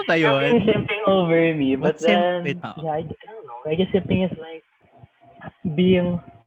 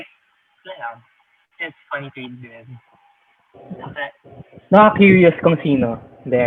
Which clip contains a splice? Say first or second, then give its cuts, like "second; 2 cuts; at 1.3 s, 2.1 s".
first; 1 cut; at 2.7 s